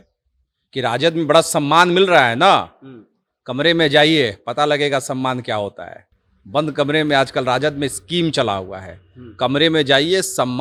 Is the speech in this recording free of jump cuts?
yes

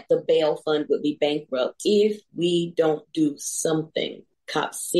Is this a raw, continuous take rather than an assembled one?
no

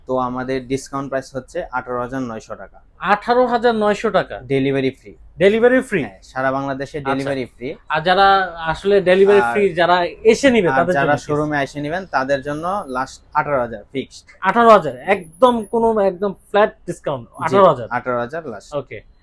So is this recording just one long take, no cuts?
yes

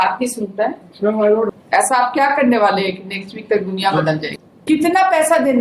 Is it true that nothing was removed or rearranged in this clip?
no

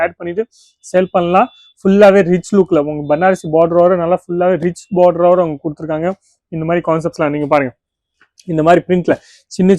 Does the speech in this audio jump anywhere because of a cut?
no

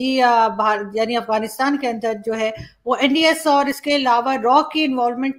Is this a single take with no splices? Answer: yes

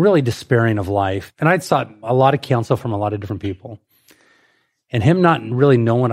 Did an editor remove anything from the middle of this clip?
yes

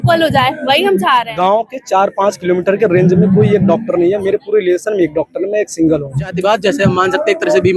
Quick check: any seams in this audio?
yes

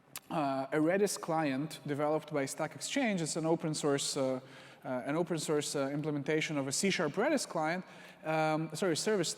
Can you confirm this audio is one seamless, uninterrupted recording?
no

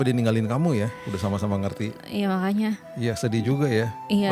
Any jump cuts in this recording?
no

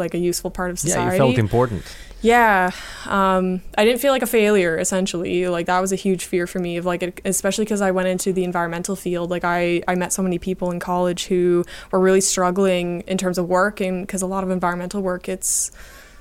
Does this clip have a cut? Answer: no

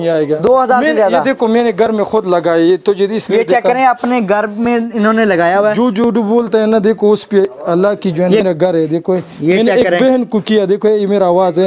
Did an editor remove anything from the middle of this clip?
yes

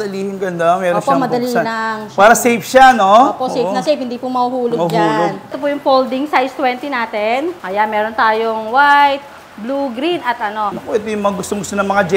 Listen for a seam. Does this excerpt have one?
yes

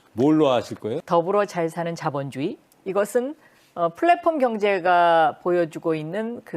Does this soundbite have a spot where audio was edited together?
yes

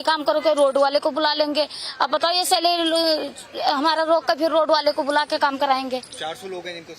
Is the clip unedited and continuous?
yes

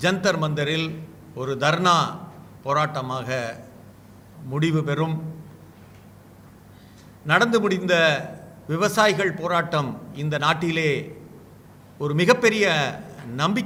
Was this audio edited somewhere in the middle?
no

